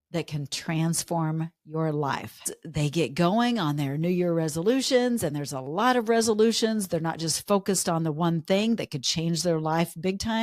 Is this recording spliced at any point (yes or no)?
yes